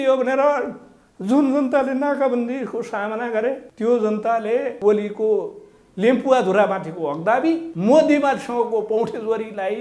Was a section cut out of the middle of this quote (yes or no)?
yes